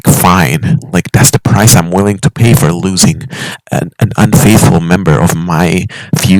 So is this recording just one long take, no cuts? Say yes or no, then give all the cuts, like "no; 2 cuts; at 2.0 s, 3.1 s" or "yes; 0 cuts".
yes; 0 cuts